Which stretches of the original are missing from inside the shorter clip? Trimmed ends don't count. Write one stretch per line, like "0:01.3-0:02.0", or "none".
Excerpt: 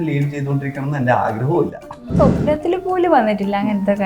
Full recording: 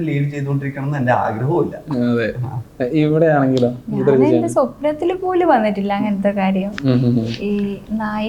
0:02.1-0:04.4